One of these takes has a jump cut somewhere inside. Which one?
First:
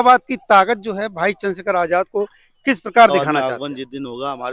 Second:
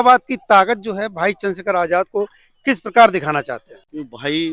first; 1 cut; at 3.1 s

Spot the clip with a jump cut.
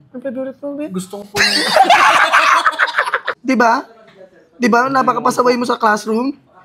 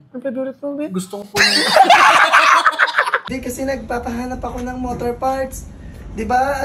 second; 1 cut; at 3.3 s

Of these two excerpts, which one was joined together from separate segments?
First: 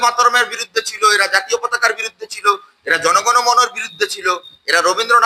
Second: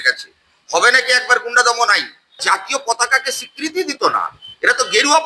second; 1 cut; at 2.4 s

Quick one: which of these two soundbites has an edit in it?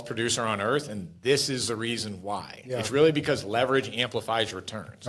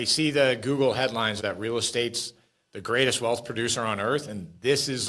second; 1 cut; at 1.4 s

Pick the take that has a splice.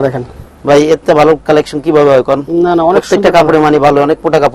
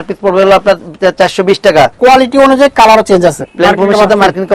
second; 2 cuts; at 1.9 s, 3.4 s

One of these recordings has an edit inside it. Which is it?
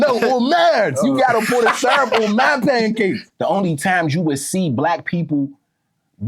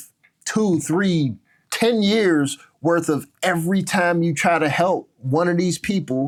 first; 1 cut; at 3.3 s

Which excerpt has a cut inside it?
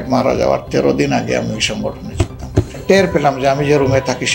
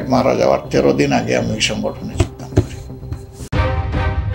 first; 1 cut; at 2.8 s

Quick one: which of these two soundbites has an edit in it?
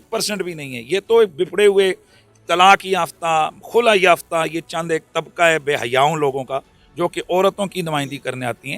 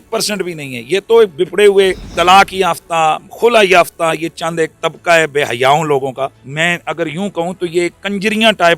second; 2 cuts; at 2.1 s, 6.4 s

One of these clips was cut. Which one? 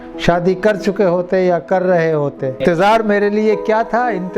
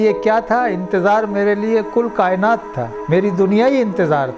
first; 1 cut; at 2.5 s

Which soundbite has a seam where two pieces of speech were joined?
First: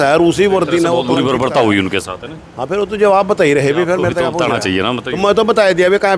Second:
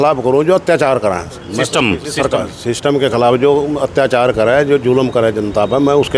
first; 2 cuts; at 1.1 s, 4.4 s

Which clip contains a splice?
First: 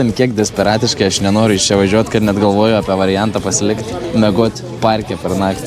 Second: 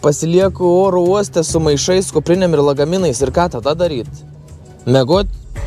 first; 1 cut; at 4.0 s

